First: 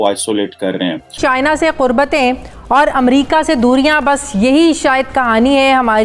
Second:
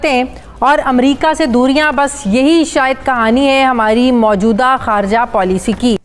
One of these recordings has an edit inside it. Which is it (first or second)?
first